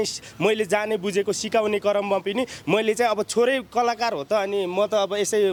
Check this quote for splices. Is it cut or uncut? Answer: uncut